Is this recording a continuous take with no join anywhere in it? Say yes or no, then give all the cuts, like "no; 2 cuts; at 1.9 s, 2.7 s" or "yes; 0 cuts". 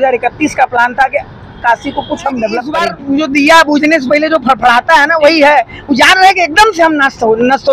no; 1 cut; at 2.9 s